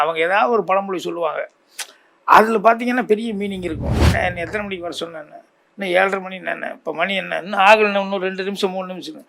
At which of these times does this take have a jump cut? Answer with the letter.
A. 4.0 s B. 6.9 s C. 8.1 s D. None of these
A